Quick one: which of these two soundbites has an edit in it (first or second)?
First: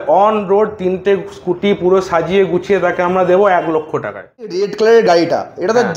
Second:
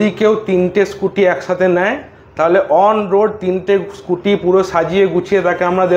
first